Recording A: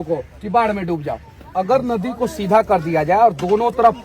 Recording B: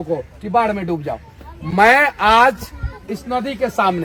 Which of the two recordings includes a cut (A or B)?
A